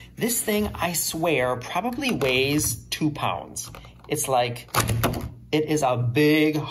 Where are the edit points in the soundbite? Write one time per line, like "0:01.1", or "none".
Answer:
none